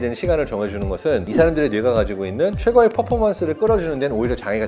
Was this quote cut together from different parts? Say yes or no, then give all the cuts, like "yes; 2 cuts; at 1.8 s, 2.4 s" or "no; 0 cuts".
no; 0 cuts